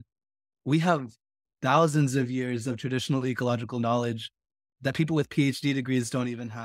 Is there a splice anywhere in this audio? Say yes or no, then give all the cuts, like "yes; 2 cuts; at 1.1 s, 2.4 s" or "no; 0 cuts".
yes; 1 cut; at 4.7 s